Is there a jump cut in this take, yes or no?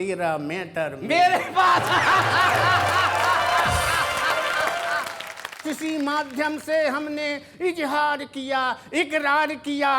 no